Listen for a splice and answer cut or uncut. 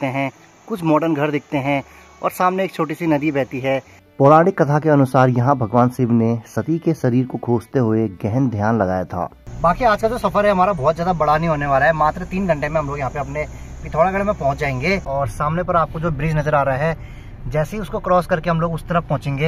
cut